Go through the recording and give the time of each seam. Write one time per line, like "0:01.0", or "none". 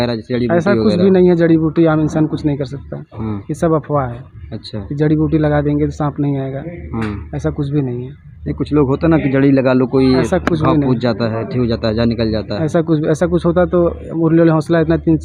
none